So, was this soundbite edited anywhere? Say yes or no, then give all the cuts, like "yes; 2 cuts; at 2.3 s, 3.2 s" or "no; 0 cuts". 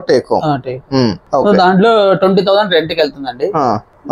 no; 0 cuts